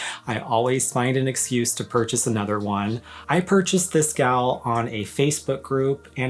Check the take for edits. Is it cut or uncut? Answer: uncut